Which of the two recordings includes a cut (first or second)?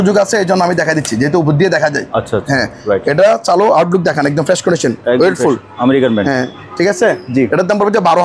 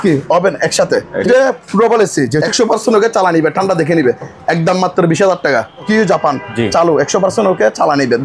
second